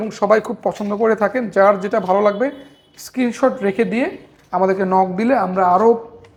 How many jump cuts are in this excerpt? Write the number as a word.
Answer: zero